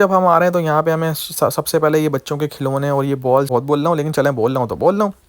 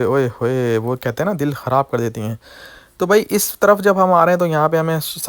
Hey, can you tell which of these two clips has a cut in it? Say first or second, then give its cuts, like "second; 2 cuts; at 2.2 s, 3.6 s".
first; 1 cut; at 3.5 s